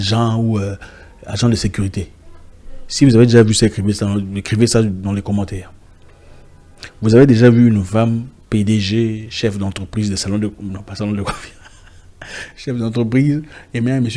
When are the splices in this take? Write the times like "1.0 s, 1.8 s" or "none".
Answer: none